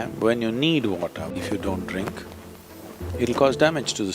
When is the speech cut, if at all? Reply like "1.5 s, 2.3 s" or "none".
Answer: 1.3 s